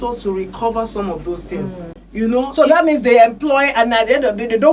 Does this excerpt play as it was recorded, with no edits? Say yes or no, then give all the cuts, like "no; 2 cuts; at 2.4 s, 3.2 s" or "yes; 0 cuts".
no; 1 cut; at 2.0 s